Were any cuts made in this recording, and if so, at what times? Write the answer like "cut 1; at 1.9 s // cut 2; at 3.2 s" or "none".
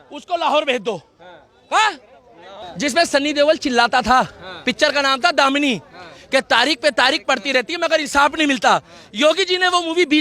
cut 1; at 2.7 s